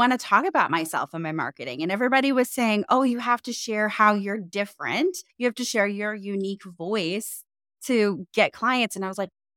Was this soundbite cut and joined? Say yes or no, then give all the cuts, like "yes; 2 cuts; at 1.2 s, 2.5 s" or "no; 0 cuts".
no; 0 cuts